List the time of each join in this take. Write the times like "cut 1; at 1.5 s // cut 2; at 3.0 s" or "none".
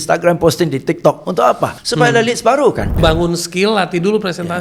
cut 1; at 1.8 s // cut 2; at 3.0 s

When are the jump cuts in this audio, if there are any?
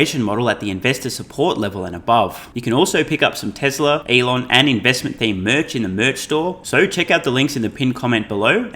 cut 1; at 2.5 s // cut 2; at 4.0 s // cut 3; at 6.6 s

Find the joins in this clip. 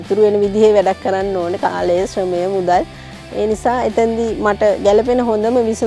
none

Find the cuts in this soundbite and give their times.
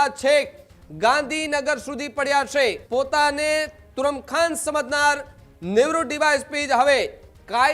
cut 1; at 2.8 s

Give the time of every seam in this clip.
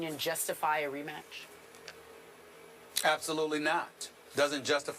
cut 1; at 1.3 s

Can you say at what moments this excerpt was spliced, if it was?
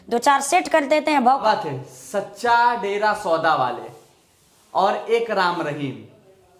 cut 1; at 1.4 s

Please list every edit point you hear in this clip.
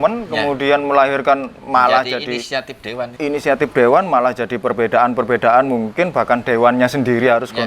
cut 1; at 3.1 s

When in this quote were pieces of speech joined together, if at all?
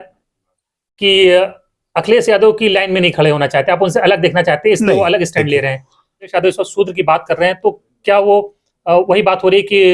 cut 1; at 6.3 s

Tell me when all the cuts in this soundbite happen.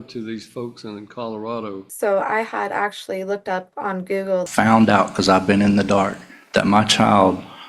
cut 1; at 1.9 s // cut 2; at 4.5 s

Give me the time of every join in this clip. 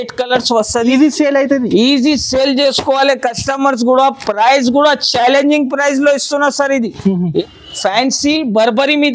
cut 1; at 7.4 s

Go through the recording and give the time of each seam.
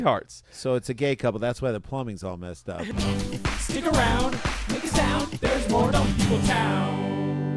cut 1; at 2.9 s

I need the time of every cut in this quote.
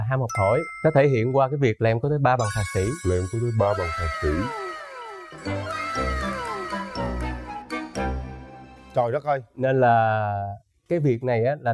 none

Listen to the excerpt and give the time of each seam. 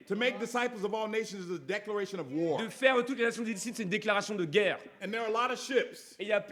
none

